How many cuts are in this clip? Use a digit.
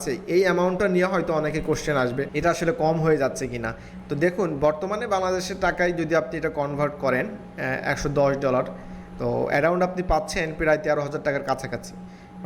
1